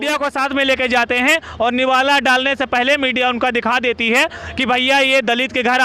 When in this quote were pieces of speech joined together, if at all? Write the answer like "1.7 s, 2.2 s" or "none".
none